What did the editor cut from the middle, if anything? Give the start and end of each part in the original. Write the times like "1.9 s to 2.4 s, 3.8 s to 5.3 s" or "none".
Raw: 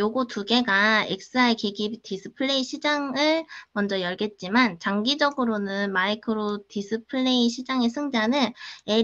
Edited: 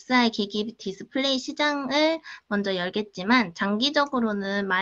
none